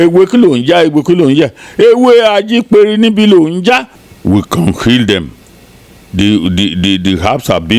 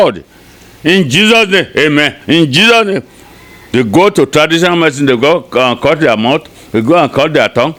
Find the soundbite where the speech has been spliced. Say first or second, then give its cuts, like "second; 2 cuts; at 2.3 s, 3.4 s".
first; 1 cut; at 3.9 s